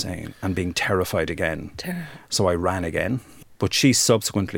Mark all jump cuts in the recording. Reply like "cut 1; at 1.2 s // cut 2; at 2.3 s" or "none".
cut 1; at 3.3 s